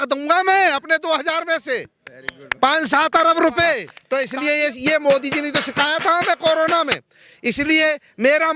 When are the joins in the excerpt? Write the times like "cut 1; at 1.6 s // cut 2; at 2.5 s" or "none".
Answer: cut 1; at 3.9 s